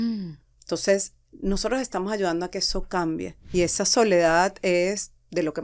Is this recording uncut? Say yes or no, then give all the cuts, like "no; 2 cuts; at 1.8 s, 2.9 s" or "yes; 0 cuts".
no; 1 cut; at 3.5 s